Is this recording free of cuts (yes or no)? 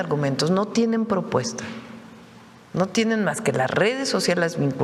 yes